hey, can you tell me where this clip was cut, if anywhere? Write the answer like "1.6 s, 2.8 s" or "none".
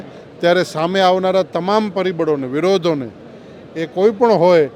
none